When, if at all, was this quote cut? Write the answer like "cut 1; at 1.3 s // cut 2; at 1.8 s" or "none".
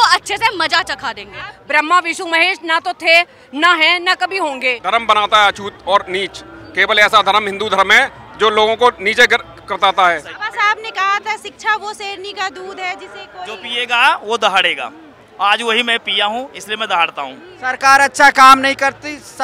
cut 1; at 1.5 s // cut 2; at 4.8 s // cut 3; at 10.3 s // cut 4; at 17.5 s